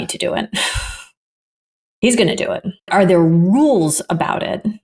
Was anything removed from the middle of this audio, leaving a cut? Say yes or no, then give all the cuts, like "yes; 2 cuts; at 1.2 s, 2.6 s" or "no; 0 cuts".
yes; 1 cut; at 2.7 s